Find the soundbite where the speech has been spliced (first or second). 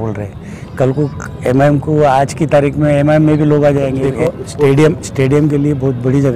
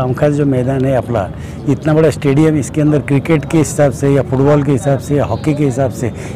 first